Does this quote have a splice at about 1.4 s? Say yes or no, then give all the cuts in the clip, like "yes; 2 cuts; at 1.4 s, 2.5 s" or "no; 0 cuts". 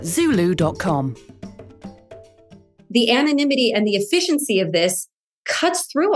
no; 1 cut; at 2.8 s